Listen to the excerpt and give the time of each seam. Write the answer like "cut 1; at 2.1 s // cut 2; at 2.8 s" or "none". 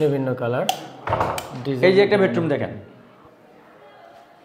none